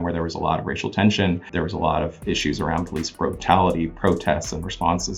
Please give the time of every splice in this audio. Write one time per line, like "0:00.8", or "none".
0:01.5